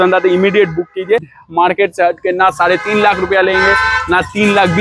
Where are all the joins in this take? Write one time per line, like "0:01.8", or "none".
0:01.4